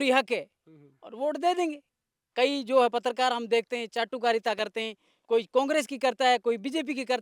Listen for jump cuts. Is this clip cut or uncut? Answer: cut